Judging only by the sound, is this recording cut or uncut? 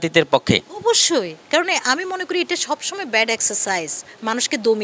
uncut